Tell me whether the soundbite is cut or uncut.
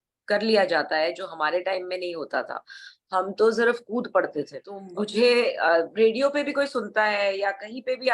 cut